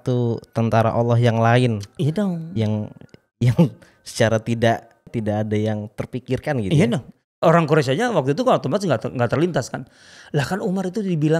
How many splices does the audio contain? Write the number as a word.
two